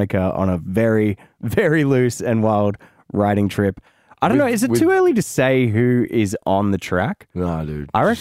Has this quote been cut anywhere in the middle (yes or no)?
no